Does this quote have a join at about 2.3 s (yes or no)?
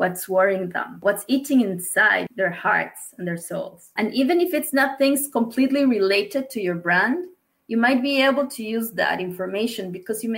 yes